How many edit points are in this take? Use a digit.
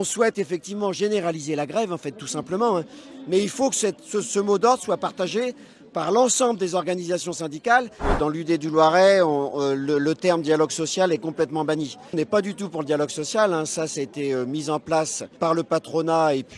3